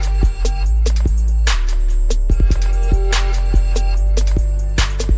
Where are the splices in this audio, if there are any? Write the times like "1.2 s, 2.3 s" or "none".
none